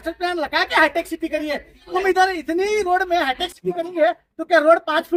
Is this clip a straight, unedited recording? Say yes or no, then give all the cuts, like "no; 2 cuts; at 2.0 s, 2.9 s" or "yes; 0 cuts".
yes; 0 cuts